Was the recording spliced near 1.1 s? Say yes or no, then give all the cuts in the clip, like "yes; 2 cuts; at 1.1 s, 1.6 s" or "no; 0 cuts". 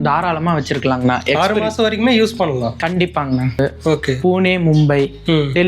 no; 1 cut; at 3.6 s